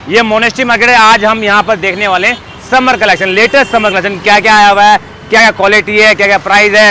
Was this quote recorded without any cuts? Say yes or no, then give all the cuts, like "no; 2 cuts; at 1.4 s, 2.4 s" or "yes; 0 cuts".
yes; 0 cuts